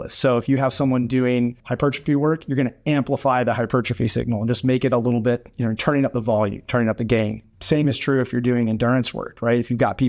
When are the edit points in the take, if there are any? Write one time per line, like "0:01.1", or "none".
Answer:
0:01.6
0:07.5